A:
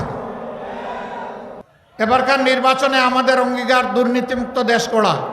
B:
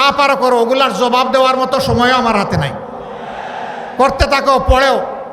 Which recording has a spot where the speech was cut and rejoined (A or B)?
A